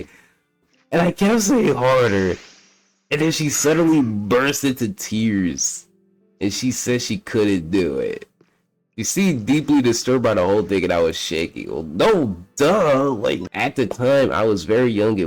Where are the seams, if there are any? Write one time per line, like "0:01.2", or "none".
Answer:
0:13.5